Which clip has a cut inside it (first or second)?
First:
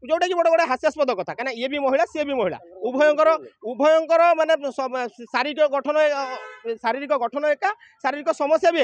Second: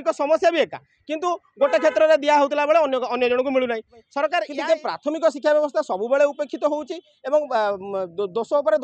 second